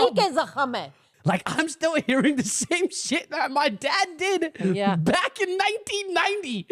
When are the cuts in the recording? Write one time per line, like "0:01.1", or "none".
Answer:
0:01.0